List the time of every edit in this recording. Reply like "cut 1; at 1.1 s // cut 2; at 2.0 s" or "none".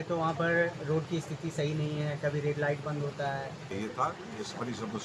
cut 1; at 3.7 s